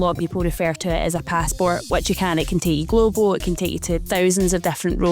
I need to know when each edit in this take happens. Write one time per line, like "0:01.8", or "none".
0:04.0